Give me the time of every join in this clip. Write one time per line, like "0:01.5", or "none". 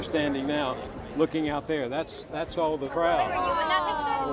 0:02.9